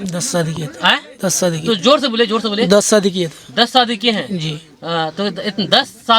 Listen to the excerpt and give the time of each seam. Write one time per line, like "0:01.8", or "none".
none